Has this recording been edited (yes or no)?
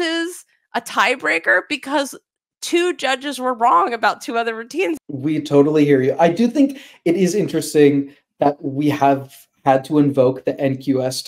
yes